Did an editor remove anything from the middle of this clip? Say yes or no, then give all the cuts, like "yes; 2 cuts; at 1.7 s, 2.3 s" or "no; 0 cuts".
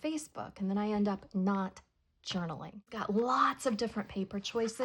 yes; 1 cut; at 3.0 s